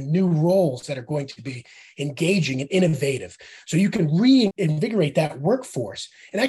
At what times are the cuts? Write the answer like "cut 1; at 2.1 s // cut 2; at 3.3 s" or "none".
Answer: cut 1; at 4.5 s